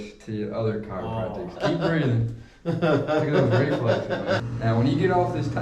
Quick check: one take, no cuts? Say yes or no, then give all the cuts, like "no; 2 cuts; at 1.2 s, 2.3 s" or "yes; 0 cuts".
no; 2 cuts; at 1.6 s, 4.5 s